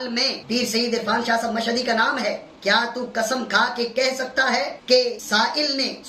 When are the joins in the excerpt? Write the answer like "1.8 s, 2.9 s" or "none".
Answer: none

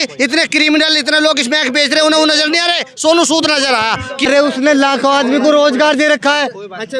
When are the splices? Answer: 4.3 s

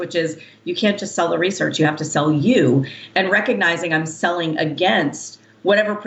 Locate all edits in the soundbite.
none

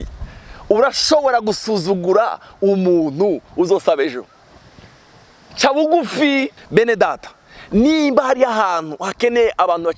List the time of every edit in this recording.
6.6 s

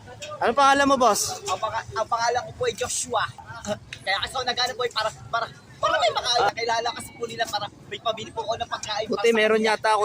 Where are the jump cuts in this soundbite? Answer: 3.4 s, 6.5 s

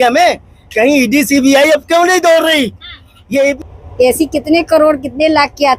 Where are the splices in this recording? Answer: 3.6 s

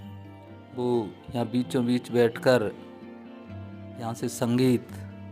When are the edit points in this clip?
none

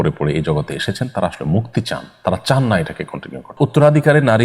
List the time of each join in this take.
3.5 s

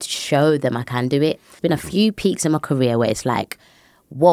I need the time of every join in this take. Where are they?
1.5 s

